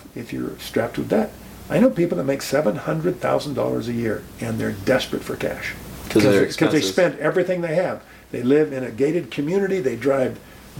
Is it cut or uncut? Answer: uncut